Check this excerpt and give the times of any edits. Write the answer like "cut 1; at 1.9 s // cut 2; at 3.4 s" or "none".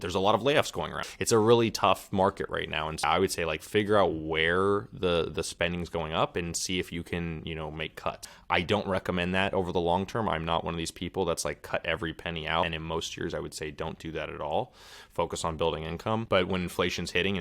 cut 1; at 1.0 s // cut 2; at 3.0 s // cut 3; at 8.2 s // cut 4; at 12.6 s // cut 5; at 16.2 s